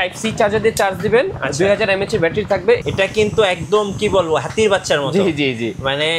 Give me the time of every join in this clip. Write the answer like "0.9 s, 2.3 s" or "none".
2.8 s